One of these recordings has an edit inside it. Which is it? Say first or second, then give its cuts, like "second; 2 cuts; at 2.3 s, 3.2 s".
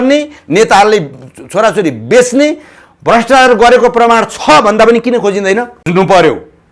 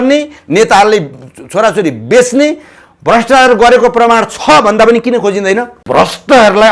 second; 1 cut; at 5.7 s